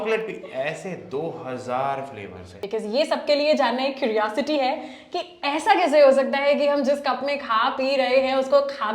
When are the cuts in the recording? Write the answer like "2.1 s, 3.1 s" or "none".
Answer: 2.5 s